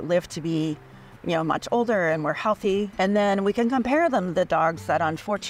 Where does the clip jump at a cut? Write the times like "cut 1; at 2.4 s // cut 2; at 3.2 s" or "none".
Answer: cut 1; at 2.9 s

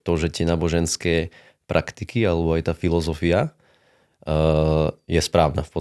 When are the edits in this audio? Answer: none

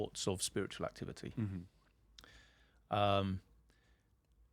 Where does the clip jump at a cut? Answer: none

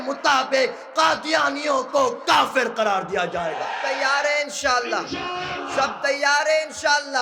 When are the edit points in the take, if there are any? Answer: cut 1; at 3.9 s

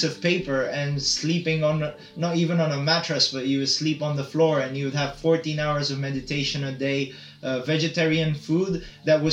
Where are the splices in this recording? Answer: none

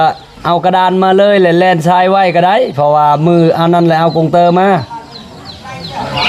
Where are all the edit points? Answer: none

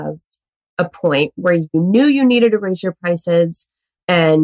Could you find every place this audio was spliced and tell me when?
cut 1; at 1.7 s

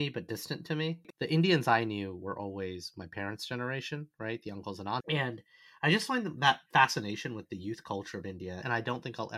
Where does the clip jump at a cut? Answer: cut 1; at 1.0 s // cut 2; at 5.0 s // cut 3; at 8.6 s

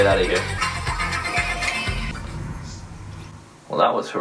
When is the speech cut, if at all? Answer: none

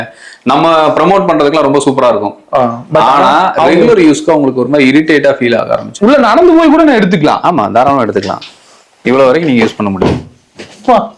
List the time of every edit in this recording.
cut 1; at 5.9 s

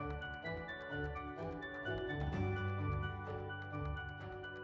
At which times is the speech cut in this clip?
none

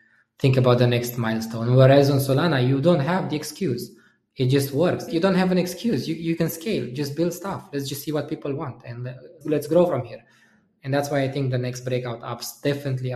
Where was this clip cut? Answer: cut 1; at 5.1 s // cut 2; at 9.4 s

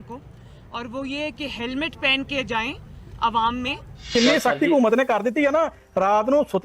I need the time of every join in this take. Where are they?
cut 1; at 4.1 s

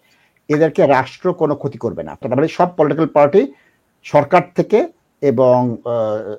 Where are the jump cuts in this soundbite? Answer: cut 1; at 2.2 s

